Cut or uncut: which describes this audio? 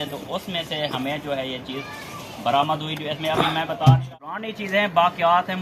cut